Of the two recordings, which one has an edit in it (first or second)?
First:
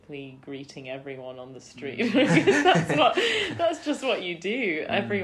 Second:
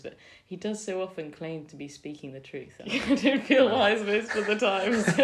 second